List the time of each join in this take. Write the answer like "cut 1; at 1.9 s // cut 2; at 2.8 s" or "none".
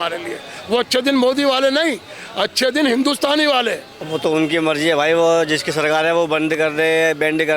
cut 1; at 3.9 s